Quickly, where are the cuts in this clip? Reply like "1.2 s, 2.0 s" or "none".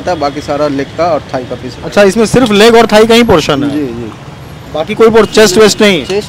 none